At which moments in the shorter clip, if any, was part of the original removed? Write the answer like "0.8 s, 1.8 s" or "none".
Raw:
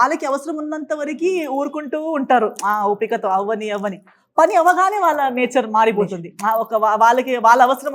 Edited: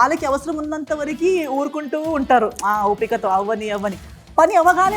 none

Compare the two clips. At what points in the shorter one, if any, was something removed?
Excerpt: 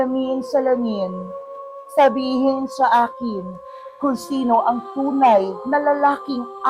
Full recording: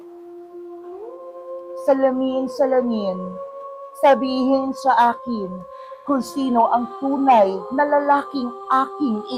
none

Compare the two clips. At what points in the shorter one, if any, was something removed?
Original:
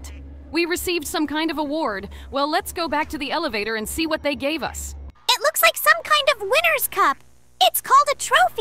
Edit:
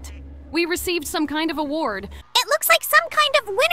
2.1 s

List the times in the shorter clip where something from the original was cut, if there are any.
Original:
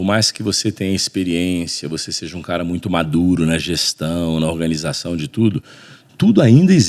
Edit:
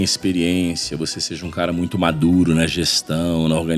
none

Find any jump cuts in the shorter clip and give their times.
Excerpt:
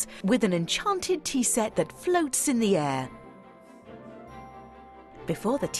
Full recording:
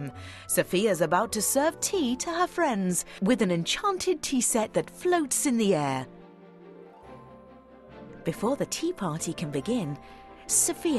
none

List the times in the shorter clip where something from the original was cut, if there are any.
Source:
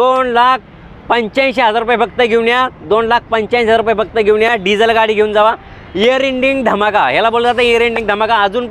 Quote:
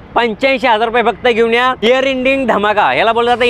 1.8 s

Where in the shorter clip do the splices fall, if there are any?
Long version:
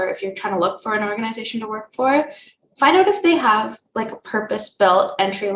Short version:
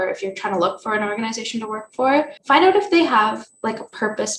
2.4 s

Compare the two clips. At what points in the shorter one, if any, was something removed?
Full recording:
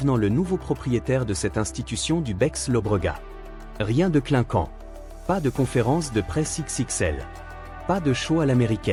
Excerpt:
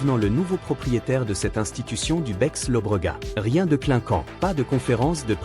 3.3 s, 4.3 s

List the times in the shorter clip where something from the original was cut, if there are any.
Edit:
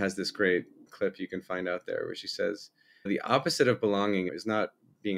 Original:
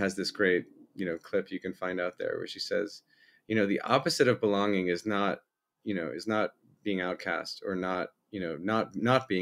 0.9 s, 3.1 s, 4.3 s

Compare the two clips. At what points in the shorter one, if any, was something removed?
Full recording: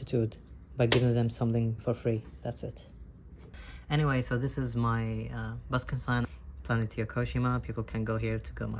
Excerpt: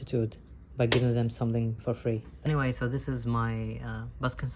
2.5 s

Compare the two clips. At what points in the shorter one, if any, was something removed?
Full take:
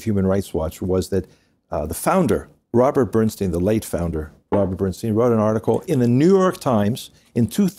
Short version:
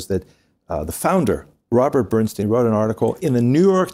2.4 s

